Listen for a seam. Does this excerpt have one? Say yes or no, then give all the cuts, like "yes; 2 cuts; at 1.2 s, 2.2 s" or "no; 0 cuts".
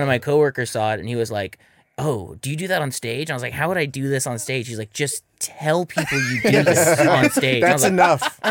no; 0 cuts